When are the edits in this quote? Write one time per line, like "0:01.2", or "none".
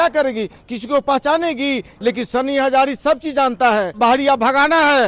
0:01.9
0:03.9